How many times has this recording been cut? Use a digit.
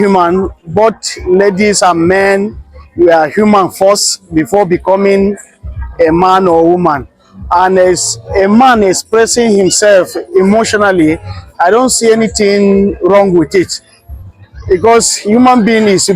0